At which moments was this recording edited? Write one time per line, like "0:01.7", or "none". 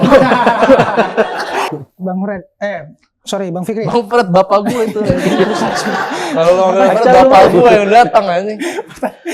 0:01.7